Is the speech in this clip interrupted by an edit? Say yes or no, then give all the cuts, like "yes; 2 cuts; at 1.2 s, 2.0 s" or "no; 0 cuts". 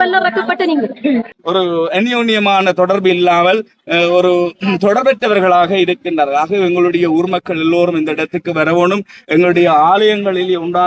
yes; 1 cut; at 1.4 s